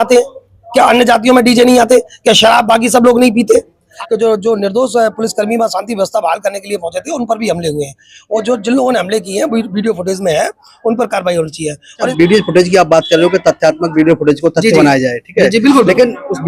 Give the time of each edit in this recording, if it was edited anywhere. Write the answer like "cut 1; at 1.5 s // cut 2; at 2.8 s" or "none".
cut 1; at 3.9 s // cut 2; at 12.1 s